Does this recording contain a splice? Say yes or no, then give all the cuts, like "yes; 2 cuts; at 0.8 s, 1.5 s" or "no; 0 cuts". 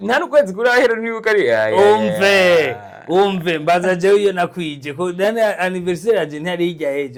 no; 0 cuts